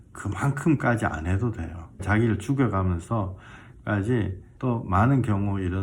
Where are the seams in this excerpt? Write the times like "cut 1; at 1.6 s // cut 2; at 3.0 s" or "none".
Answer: cut 1; at 2.0 s // cut 2; at 4.4 s